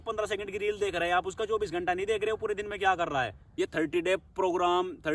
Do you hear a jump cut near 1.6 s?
no; 1 cut; at 3.4 s

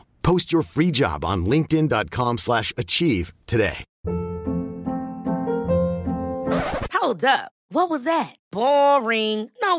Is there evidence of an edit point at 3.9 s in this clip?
yes; 1 cut; at 3.9 s

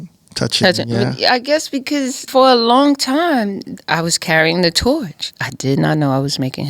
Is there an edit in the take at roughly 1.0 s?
no; 3 cuts; at 2.3 s, 3.6 s, 5.2 s

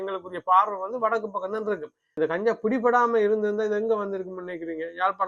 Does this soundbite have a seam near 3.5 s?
no; 1 cut; at 2.0 s

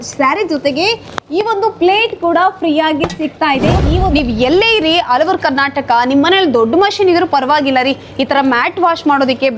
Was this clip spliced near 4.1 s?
yes; 1 cut; at 4.1 s

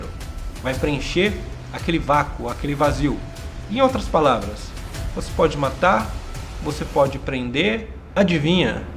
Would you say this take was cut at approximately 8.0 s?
yes; 1 cut; at 8.0 s

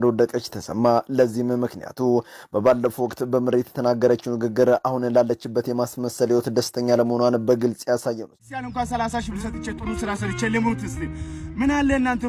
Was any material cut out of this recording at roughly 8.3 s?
yes; 1 cut; at 8.3 s

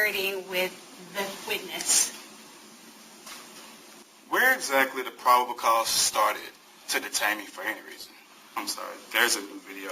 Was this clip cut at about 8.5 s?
yes; 2 cuts; at 3.9 s, 8.5 s

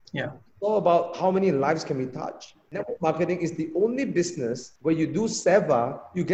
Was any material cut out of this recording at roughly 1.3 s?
no; 2 cuts; at 2.8 s, 4.7 s

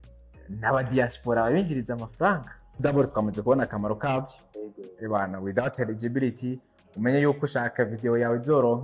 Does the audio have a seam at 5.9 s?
no; 1 cut; at 2.8 s

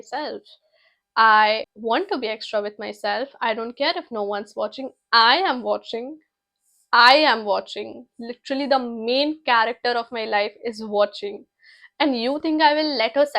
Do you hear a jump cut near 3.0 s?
no; 1 cut; at 1.7 s

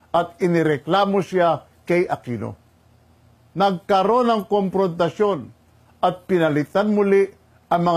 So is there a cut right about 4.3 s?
yes; 1 cut; at 4.3 s

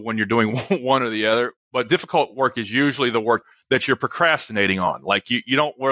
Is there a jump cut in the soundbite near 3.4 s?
yes; 2 cuts; at 1.6 s, 3.4 s

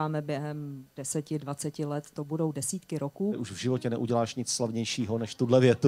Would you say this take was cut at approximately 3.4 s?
yes; 1 cut; at 3.4 s

